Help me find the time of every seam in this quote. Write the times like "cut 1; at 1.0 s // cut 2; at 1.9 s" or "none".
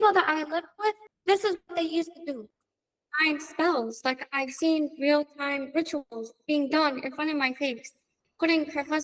cut 1; at 2.5 s